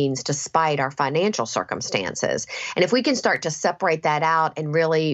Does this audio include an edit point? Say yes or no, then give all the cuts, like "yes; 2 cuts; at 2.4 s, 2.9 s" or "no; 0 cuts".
no; 0 cuts